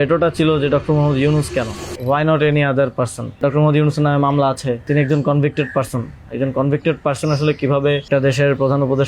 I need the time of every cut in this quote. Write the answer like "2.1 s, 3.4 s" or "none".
1.9 s, 3.4 s, 4.8 s, 8.1 s